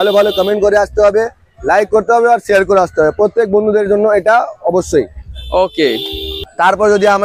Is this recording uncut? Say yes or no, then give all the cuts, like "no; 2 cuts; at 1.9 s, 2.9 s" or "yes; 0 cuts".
yes; 0 cuts